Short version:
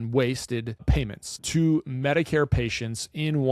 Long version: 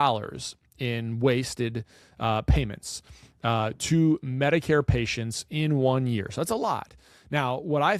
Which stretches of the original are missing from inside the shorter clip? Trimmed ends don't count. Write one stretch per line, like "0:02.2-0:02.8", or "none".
0:02.3-0:03.5